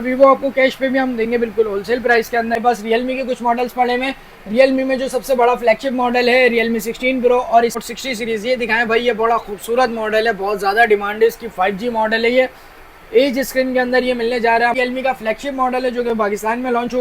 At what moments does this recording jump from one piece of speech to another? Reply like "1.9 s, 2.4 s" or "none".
2.6 s, 7.8 s, 14.7 s